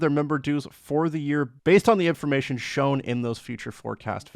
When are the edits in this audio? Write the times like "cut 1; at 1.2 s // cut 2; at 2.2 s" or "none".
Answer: none